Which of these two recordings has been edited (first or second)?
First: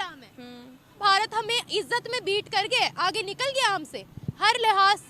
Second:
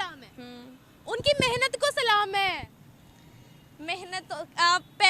first